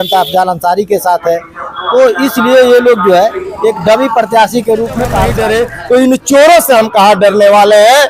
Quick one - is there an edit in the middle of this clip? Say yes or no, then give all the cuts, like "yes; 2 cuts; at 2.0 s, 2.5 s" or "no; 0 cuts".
yes; 1 cut; at 5.3 s